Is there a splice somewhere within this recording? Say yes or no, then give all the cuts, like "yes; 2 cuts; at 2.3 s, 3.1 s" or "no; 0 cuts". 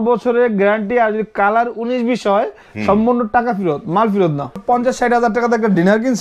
yes; 1 cut; at 4.6 s